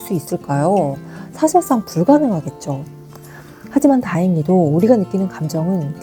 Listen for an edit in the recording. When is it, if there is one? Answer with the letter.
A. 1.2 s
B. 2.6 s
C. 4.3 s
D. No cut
D